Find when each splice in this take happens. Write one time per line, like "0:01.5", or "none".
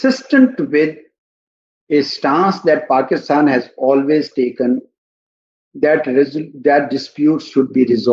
none